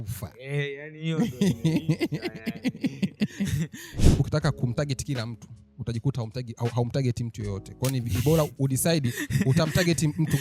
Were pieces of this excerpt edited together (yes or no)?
yes